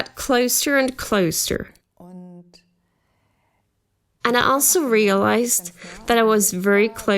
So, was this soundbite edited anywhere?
yes; 1 cut; at 1.8 s

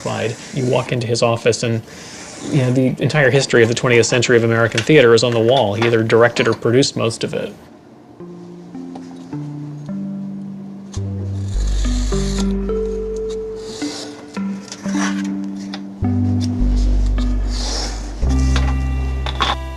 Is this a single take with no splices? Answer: yes; 0 cuts

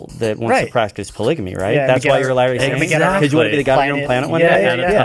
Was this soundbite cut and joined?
no; 0 cuts

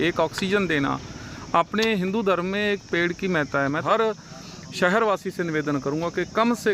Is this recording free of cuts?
no; 1 cut; at 3.8 s

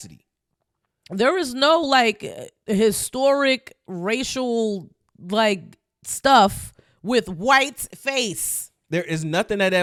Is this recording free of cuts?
yes; 0 cuts

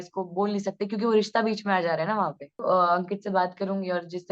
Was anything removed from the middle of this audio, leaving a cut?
yes; 1 cut; at 2.6 s

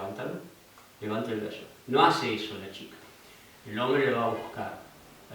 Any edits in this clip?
no; 0 cuts

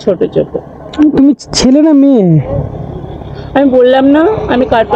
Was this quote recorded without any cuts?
yes; 0 cuts

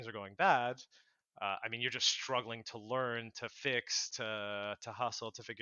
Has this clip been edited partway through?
no; 0 cuts

